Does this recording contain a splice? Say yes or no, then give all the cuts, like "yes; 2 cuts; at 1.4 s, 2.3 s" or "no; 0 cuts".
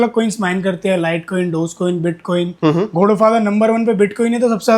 no; 0 cuts